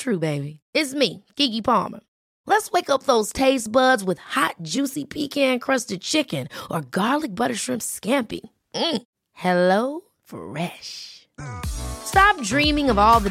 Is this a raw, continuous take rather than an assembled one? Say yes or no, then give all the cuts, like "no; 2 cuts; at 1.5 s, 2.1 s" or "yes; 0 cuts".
yes; 0 cuts